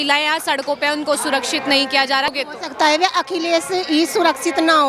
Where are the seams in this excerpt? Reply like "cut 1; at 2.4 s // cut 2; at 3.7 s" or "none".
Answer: cut 1; at 2.3 s